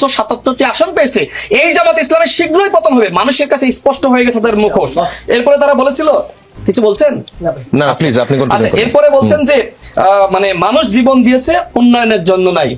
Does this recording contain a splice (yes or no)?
no